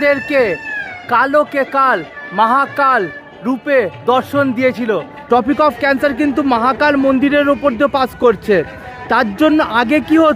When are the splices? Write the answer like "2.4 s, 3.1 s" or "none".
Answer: 5.1 s